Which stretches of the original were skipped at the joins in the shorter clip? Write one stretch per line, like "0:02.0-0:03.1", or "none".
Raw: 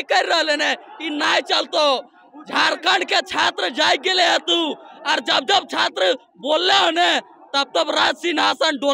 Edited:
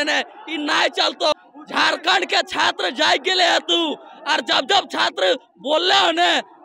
0:01.9-0:02.1